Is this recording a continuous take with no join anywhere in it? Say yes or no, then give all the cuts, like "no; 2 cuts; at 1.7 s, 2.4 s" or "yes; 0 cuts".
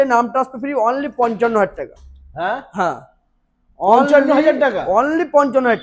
yes; 0 cuts